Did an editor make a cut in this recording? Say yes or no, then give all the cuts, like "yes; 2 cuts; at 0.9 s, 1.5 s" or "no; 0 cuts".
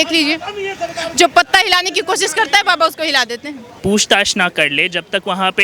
yes; 1 cut; at 3.6 s